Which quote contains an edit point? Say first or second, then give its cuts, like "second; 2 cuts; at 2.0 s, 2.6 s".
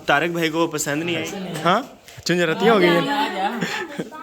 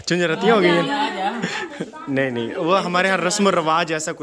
first; 1 cut; at 1.3 s